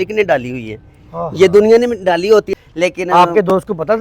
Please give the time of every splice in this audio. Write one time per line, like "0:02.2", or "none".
0:02.5